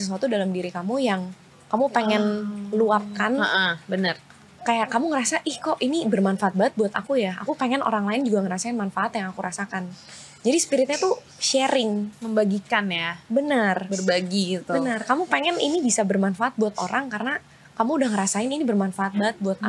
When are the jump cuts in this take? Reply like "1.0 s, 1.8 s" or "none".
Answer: none

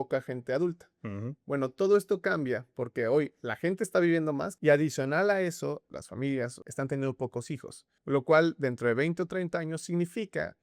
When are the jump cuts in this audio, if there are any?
4.5 s, 5.9 s, 6.6 s

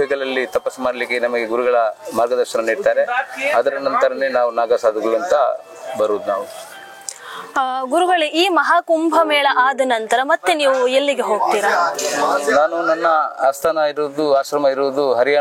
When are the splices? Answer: none

